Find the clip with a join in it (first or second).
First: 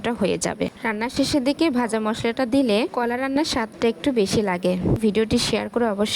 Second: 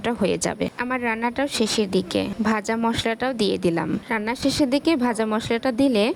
first